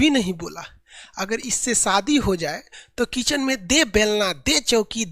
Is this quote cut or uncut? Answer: uncut